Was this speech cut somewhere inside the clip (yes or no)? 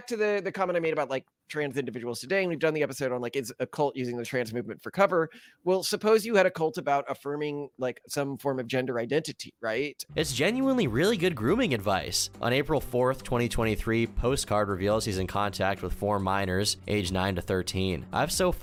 no